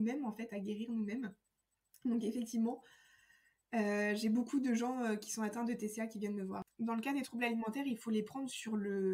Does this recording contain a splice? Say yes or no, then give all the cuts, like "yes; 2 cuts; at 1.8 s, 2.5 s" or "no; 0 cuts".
yes; 1 cut; at 6.6 s